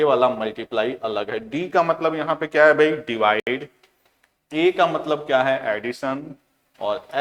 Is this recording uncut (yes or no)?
yes